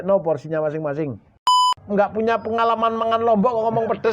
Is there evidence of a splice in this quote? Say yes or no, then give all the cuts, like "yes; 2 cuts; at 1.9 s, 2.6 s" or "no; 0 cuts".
yes; 1 cut; at 1.7 s